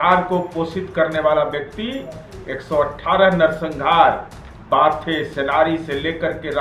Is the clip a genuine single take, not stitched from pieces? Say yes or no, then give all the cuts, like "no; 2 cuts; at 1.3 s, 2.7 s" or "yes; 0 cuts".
yes; 0 cuts